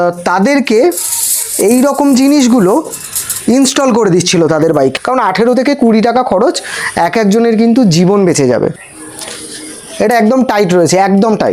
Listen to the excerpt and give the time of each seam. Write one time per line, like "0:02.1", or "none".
0:04.9
0:08.7